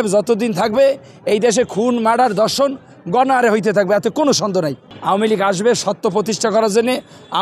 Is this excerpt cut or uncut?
cut